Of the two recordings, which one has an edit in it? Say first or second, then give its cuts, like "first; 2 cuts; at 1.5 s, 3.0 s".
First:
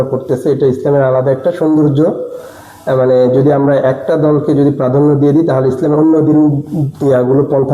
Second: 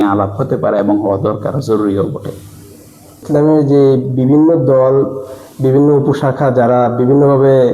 second; 1 cut; at 3.2 s